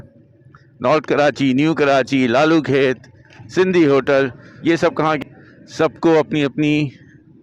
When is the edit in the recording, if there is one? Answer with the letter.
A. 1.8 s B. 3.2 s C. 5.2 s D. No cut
C